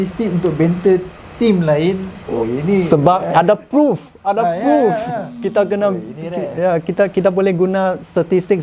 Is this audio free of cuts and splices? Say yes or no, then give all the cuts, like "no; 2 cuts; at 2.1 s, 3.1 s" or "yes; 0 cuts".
yes; 0 cuts